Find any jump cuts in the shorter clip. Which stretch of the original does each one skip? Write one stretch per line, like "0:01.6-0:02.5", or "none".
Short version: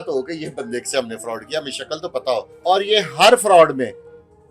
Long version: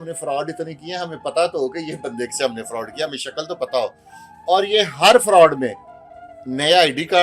0:04.0-0:04.3